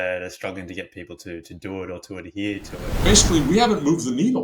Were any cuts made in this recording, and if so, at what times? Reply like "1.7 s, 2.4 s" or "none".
3.0 s